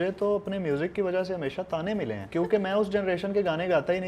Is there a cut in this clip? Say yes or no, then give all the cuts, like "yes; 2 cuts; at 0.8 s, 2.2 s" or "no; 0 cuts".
yes; 1 cut; at 2.2 s